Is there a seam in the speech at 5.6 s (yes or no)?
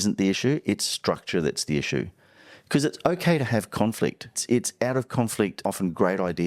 yes